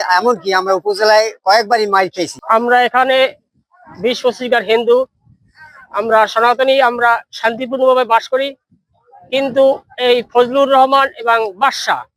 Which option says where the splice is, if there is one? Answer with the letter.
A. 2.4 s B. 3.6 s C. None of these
A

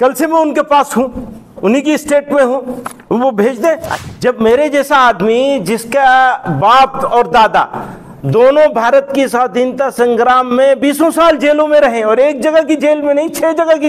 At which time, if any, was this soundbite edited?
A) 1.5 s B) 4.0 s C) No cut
B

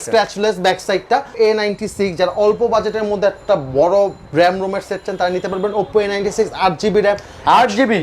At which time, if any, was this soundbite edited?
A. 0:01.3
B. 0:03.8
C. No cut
A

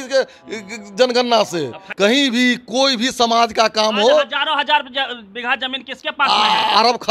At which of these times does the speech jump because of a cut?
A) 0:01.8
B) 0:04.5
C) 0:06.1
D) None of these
A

